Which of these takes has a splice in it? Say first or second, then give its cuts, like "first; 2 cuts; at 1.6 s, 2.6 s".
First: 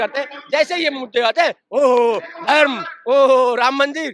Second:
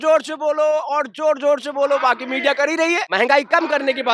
second; 1 cut; at 3.1 s